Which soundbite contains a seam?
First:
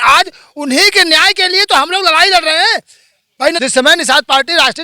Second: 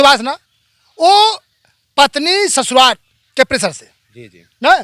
first; 1 cut; at 3.6 s

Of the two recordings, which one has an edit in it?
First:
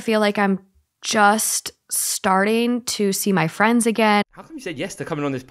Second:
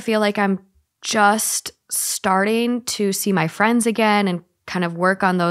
first; 1 cut; at 4.2 s

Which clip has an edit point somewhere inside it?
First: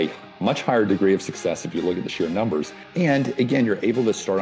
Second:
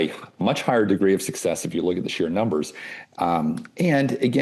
first; 1 cut; at 2.8 s

